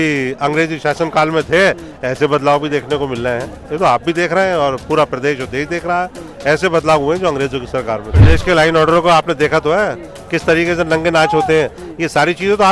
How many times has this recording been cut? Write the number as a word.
one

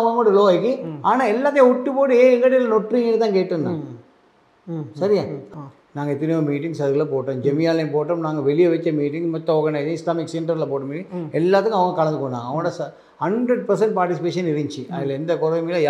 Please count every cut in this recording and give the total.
one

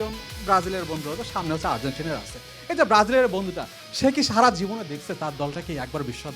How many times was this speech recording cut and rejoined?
zero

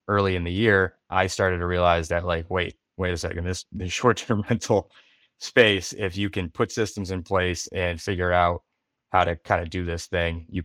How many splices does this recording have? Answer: zero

